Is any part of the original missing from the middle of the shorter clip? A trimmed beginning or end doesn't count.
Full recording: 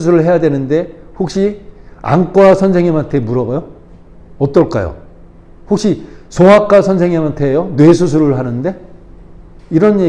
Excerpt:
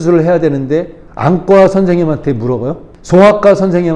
yes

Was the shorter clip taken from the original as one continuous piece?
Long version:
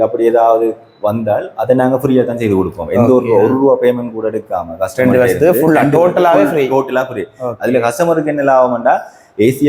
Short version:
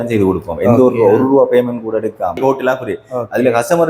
no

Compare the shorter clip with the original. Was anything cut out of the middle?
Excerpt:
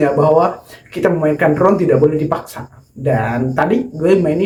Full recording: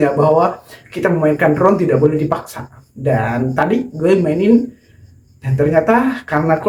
no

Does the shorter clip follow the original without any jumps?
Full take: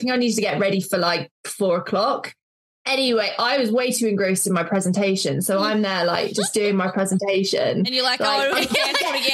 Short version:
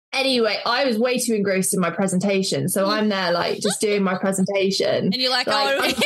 yes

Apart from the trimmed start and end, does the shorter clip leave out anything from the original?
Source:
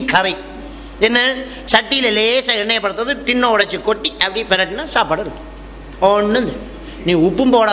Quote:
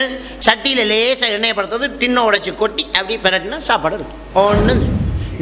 yes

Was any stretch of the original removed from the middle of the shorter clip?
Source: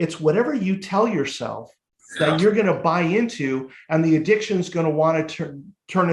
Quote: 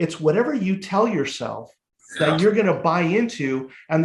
no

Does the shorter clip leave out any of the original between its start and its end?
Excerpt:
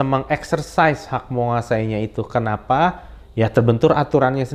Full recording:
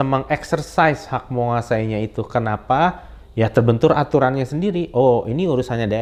no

